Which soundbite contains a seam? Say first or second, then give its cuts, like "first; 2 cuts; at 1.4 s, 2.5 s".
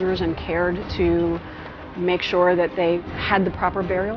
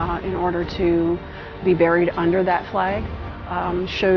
first; 1 cut; at 3.0 s